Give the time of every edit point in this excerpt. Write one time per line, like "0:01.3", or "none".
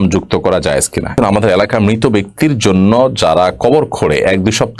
0:01.1